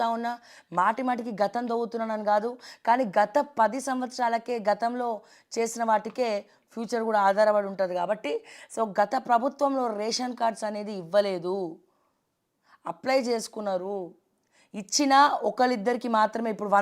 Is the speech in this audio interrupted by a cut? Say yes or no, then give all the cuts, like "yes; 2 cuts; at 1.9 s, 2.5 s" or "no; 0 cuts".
no; 0 cuts